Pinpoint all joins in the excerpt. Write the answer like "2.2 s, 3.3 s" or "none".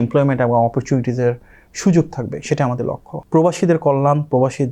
3.1 s